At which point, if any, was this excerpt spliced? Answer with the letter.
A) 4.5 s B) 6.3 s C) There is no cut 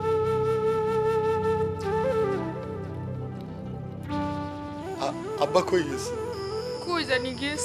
C